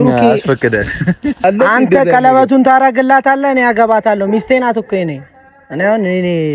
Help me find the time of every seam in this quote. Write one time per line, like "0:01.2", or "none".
0:01.4